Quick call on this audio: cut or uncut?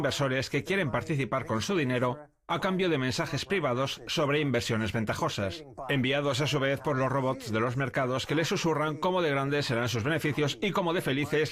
cut